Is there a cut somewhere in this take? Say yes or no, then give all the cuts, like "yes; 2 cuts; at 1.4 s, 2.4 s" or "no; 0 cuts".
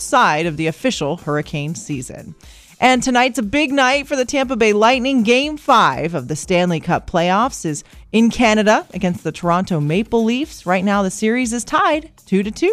no; 0 cuts